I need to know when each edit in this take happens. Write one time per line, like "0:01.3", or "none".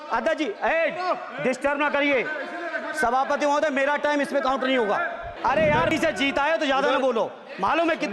0:05.3